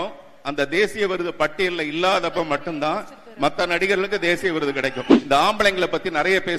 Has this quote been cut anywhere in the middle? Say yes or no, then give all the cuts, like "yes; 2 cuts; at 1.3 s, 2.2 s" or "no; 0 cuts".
yes; 1 cut; at 5.1 s